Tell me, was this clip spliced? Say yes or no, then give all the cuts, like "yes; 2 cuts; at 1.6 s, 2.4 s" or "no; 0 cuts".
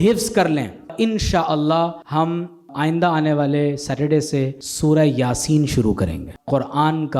yes; 4 cuts; at 0.9 s, 2.5 s, 4.6 s, 6.3 s